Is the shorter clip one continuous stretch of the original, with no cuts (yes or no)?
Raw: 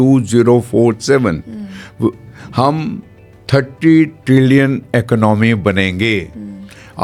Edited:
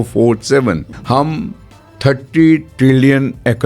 no